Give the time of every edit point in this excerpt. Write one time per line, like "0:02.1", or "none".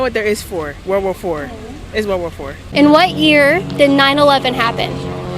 0:02.7